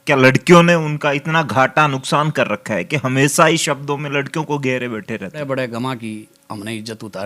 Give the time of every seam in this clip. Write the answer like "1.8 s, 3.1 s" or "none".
5.4 s